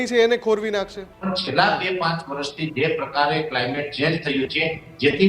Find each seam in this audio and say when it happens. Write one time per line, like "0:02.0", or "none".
0:01.0